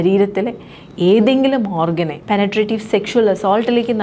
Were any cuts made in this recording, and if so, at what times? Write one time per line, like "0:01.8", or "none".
0:02.2